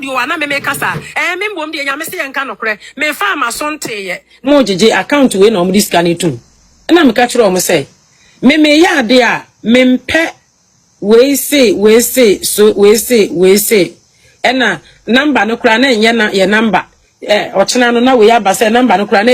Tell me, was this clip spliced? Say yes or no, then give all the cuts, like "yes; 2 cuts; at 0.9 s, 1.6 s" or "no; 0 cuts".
yes; 1 cut; at 4.5 s